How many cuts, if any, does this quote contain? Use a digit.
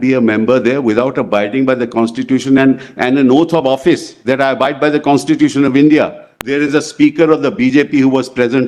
1